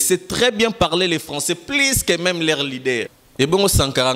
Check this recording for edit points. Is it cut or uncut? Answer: cut